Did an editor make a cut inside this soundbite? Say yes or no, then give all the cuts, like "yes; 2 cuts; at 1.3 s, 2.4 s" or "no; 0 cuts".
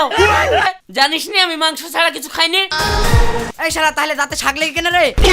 yes; 2 cuts; at 0.7 s, 2.7 s